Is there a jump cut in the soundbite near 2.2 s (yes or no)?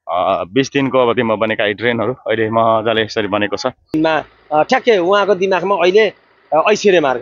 no